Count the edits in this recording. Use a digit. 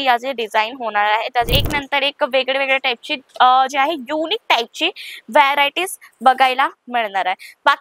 1